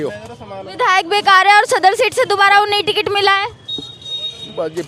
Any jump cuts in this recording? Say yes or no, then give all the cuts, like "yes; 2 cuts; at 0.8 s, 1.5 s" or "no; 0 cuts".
no; 0 cuts